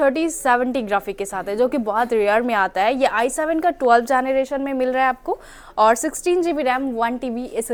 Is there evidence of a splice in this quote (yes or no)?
no